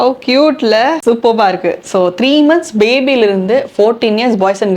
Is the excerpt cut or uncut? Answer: cut